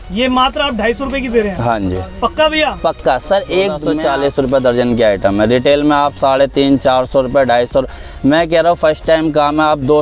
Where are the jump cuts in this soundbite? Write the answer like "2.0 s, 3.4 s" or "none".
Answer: 3.9 s